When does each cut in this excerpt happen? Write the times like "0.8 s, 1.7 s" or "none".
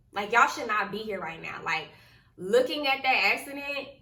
none